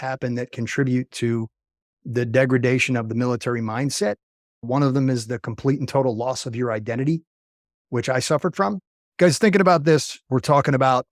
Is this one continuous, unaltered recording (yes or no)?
no